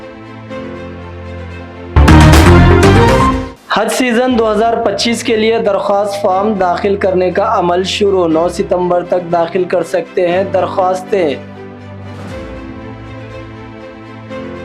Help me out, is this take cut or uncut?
cut